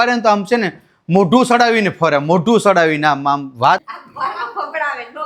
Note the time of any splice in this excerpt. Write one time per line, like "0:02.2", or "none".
0:04.0